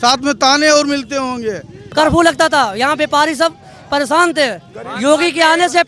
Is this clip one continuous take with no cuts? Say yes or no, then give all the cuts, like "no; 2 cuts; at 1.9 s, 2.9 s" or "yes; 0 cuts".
no; 1 cut; at 1.8 s